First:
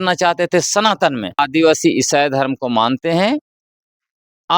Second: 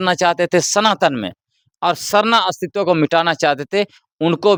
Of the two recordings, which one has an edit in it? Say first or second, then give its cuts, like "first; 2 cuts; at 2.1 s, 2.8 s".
first; 1 cut; at 1.4 s